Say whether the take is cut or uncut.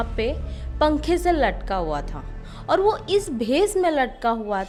uncut